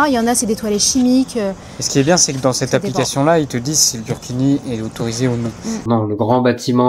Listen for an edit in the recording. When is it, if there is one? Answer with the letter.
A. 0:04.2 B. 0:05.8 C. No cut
B